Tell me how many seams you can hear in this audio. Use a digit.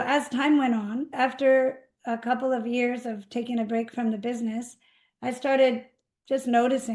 1